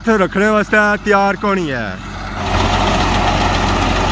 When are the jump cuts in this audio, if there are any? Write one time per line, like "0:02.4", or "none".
0:02.4